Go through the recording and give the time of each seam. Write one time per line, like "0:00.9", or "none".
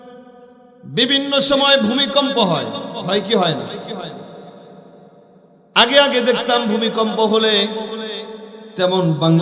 none